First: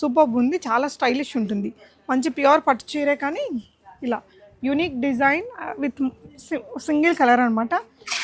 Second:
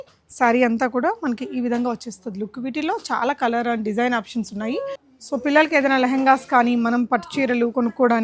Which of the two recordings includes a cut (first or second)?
second